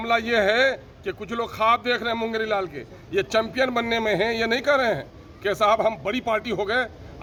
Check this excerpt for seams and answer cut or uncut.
uncut